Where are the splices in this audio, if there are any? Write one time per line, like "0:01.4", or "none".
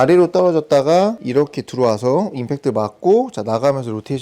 0:01.2